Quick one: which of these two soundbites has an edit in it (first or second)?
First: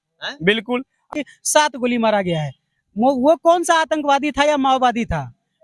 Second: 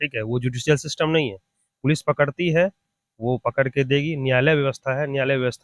first